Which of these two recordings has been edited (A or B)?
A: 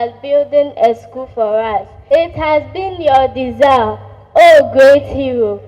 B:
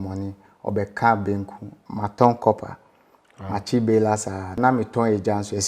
A